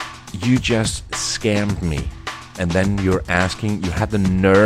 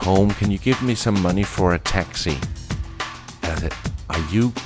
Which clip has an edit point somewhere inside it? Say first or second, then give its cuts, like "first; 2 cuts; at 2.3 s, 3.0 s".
first; 1 cut; at 2.5 s